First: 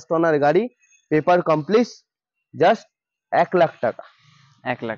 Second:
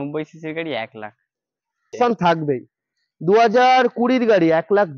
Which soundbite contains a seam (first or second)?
second